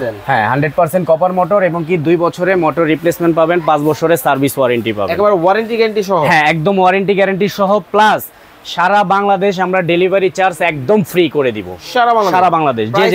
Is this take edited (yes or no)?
no